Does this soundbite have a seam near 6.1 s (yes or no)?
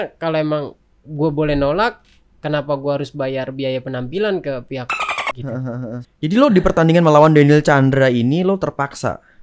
yes